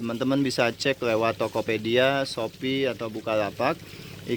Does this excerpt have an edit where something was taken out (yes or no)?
no